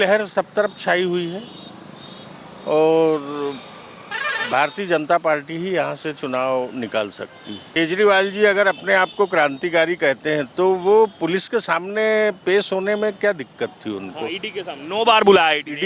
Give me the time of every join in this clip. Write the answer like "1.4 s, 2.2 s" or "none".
7.8 s